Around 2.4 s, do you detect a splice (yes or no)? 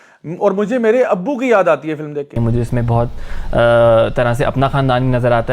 yes